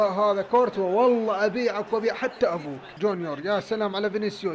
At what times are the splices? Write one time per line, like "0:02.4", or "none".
0:02.9